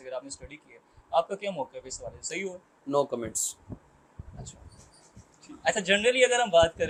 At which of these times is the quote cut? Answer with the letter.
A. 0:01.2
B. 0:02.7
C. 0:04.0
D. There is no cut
D